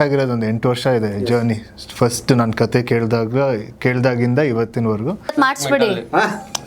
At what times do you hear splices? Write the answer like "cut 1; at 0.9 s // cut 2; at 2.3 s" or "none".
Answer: cut 1; at 5.2 s